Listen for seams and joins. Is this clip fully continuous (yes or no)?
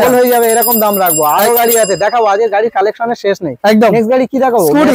yes